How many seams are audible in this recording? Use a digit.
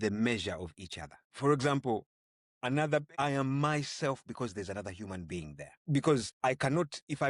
4